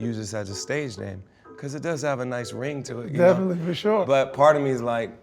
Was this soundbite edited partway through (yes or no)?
yes